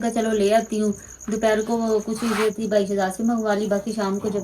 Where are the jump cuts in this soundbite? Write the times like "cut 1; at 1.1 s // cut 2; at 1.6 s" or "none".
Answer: none